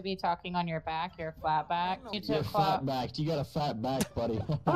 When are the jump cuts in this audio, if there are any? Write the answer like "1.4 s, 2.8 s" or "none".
2.2 s